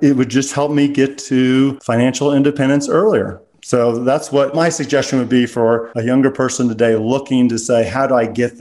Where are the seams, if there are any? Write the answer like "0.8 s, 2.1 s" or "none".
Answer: 1.8 s, 5.9 s